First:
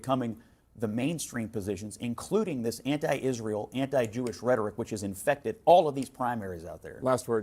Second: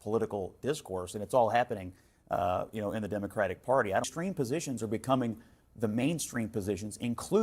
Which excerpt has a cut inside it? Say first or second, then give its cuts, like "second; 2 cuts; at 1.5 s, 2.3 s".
second; 1 cut; at 4.1 s